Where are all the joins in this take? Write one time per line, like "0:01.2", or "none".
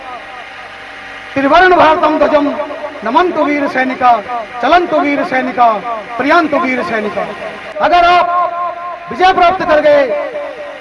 0:07.7